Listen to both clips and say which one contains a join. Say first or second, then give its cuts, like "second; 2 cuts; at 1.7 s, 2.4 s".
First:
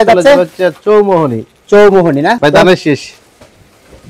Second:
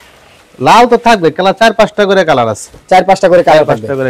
first; 1 cut; at 2.4 s